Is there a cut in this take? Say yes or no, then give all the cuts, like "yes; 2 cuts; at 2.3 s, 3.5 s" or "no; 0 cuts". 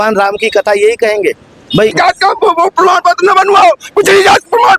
yes; 1 cut; at 1.9 s